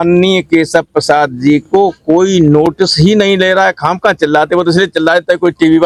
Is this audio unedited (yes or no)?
yes